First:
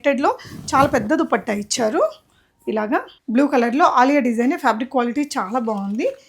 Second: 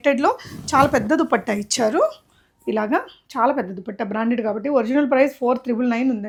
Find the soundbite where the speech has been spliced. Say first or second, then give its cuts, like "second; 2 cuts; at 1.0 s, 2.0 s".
first; 1 cut; at 3.2 s